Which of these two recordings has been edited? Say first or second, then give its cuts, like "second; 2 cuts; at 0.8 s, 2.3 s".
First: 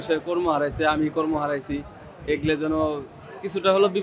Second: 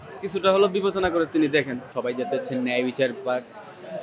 second; 1 cut; at 1.9 s